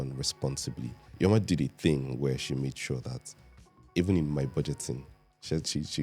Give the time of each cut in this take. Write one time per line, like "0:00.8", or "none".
0:01.0